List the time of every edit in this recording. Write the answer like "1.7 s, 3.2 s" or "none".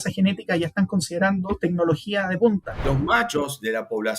2.9 s